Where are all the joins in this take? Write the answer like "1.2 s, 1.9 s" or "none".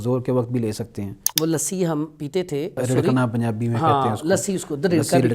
1.2 s, 2.8 s